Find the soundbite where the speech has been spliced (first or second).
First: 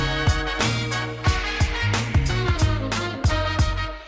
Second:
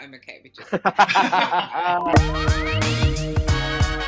second